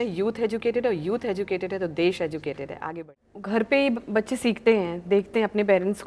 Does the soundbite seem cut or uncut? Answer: cut